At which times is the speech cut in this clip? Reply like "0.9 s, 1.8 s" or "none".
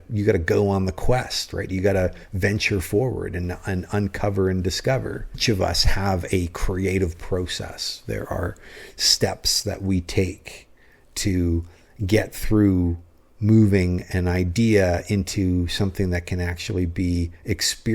5.4 s